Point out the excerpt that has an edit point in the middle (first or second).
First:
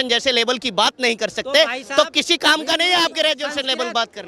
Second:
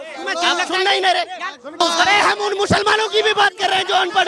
second